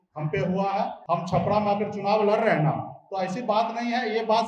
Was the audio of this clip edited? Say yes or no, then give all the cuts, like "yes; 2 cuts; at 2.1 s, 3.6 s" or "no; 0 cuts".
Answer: yes; 1 cut; at 1.0 s